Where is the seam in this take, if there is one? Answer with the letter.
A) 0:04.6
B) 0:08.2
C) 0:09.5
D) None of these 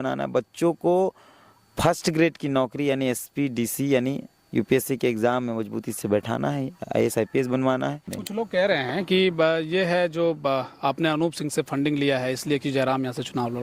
B